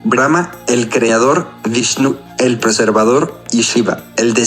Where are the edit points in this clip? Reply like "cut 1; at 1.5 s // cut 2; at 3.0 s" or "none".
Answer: cut 1; at 1.5 s // cut 2; at 3.4 s